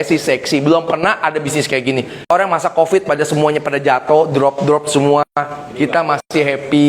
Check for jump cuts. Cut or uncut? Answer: cut